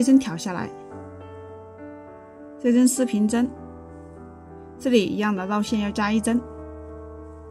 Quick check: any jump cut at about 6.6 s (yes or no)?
yes